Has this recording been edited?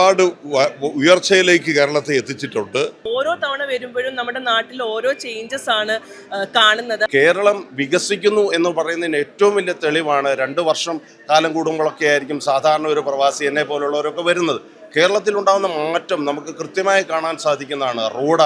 yes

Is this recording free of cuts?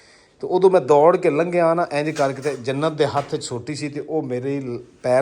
yes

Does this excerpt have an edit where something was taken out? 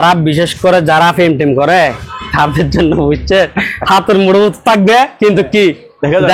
no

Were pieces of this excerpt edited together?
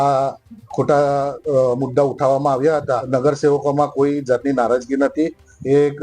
yes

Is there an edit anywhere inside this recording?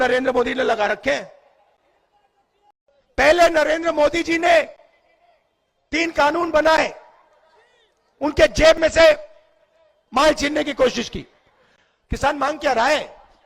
yes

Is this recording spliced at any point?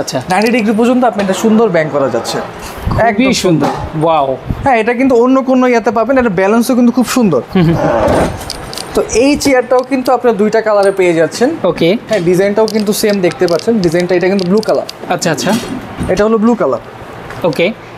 no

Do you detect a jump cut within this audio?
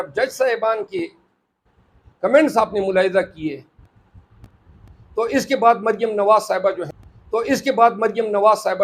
no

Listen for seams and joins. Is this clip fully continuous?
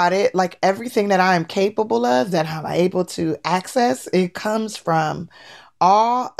yes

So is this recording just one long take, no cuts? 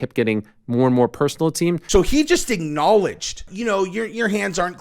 no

